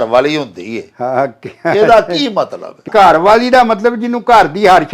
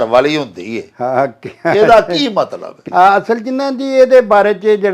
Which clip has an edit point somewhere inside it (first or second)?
first